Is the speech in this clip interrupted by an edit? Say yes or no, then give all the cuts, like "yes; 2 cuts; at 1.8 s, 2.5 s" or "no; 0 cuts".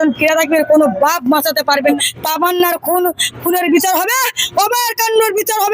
yes; 1 cut; at 1.8 s